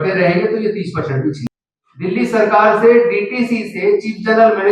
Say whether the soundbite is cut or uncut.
cut